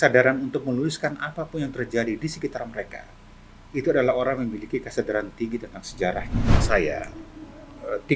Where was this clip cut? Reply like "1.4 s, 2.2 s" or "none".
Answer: 6.6 s